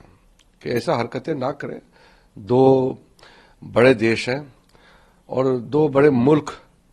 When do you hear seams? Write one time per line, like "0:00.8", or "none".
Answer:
none

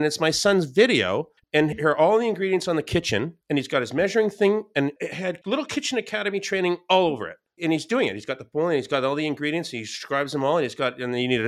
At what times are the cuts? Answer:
0:01.4

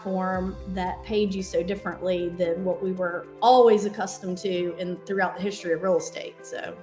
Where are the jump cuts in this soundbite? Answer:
none

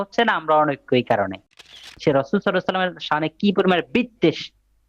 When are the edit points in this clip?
0:01.7

